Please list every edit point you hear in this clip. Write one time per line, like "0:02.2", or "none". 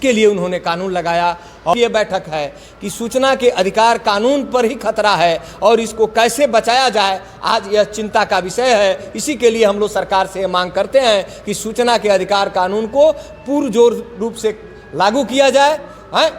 0:01.7

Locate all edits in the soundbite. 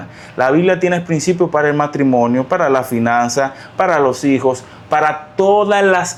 none

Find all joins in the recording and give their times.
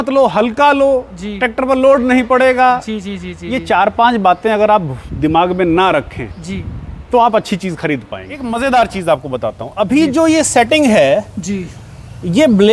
0:08.4

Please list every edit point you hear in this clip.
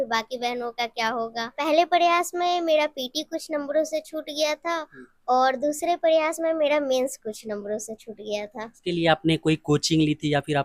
0:01.6
0:08.8

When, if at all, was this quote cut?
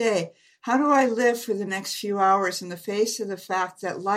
none

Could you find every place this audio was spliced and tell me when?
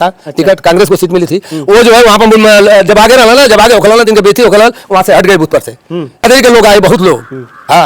0:06.2

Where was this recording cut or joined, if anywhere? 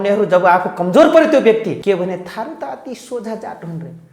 0:01.8

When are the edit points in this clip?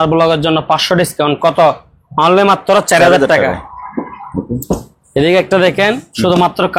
none

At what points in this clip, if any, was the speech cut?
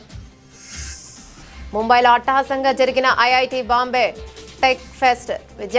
0:00.8
0:01.2

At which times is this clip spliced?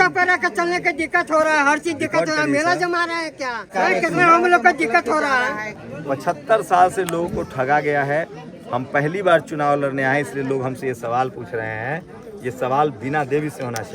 0:03.7
0:05.7

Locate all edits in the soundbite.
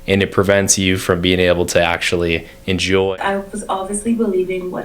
0:03.1

